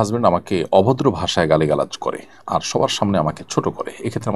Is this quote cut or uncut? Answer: uncut